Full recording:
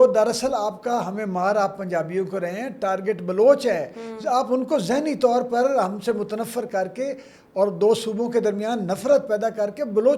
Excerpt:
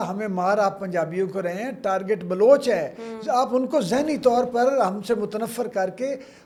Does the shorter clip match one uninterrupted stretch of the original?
yes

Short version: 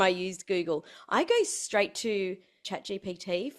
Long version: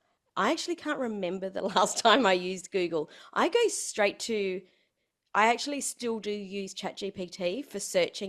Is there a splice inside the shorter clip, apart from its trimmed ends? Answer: yes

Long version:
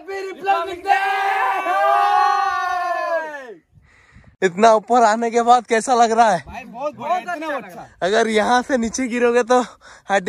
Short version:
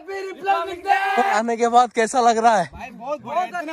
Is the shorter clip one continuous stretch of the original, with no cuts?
no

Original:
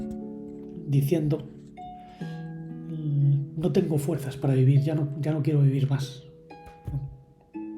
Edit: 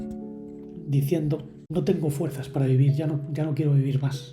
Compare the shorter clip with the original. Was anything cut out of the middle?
yes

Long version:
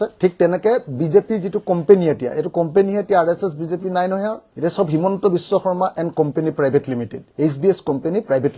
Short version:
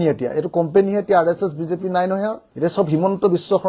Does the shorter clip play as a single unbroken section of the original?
yes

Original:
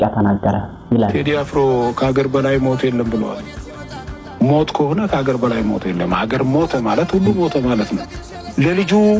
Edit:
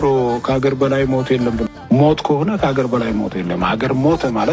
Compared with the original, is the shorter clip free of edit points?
no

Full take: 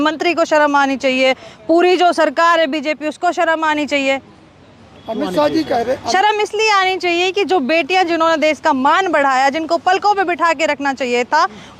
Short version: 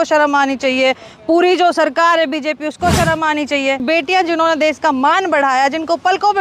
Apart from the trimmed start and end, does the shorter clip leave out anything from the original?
yes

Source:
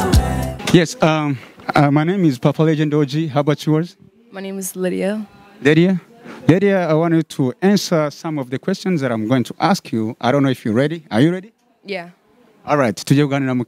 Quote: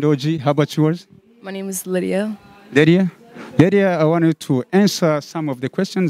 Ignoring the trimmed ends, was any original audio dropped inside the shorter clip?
no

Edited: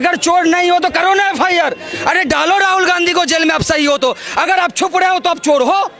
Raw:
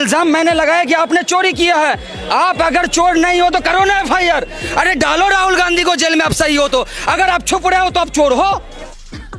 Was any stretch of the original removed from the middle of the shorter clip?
no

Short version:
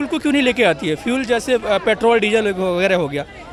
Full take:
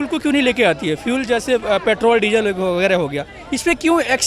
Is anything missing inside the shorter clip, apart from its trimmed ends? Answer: no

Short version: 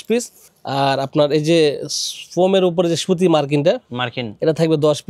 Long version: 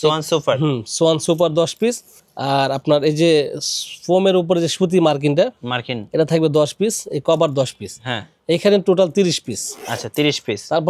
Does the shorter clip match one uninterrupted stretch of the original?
yes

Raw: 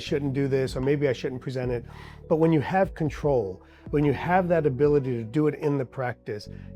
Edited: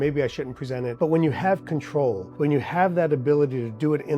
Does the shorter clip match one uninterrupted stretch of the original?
no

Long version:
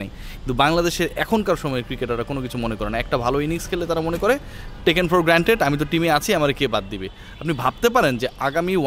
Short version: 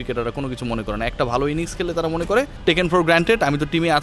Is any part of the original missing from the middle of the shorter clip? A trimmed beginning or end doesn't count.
yes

